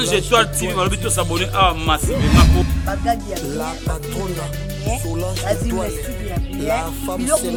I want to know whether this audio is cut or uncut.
uncut